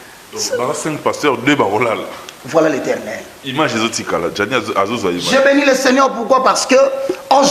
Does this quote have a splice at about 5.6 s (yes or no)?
no